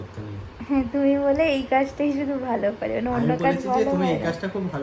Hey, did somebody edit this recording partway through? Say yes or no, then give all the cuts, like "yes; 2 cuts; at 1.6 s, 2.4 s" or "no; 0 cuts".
no; 0 cuts